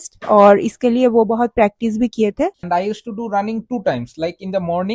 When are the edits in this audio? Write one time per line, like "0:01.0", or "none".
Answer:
0:02.7